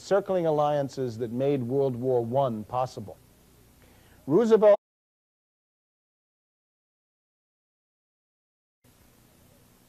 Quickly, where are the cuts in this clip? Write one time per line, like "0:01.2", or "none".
none